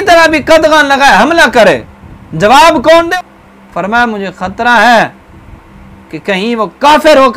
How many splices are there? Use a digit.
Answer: 1